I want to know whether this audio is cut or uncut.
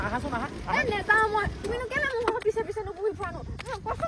uncut